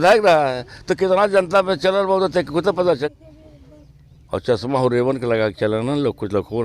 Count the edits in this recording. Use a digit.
1